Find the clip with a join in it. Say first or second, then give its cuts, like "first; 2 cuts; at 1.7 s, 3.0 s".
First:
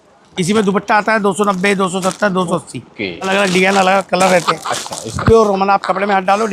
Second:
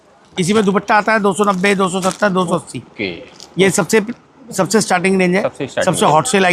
first; 2 cuts; at 3.3 s, 5.1 s